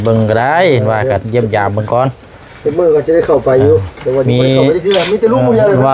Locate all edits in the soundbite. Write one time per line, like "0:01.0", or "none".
none